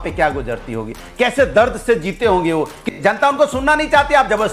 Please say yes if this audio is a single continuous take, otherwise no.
no